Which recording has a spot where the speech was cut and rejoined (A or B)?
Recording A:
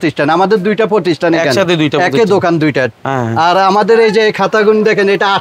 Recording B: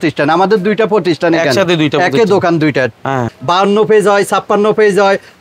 B